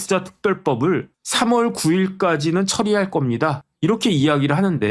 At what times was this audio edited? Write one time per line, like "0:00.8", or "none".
0:01.2
0:03.7